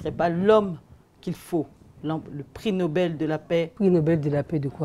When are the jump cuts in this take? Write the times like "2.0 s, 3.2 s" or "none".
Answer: 3.7 s